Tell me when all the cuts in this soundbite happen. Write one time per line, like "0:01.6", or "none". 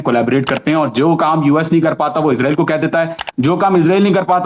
none